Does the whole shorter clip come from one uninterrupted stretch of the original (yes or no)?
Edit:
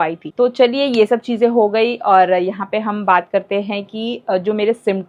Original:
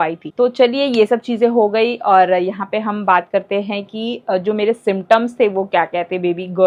yes